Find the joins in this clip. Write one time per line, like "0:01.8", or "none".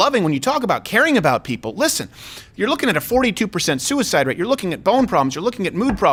none